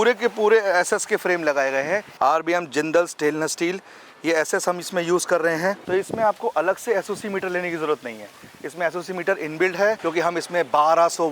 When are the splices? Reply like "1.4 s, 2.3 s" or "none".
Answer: 2.1 s, 5.8 s, 10.0 s